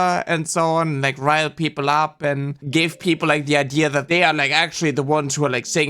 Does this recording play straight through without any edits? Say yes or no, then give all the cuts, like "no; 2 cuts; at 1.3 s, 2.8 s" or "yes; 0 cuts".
no; 2 cuts; at 2.6 s, 4.0 s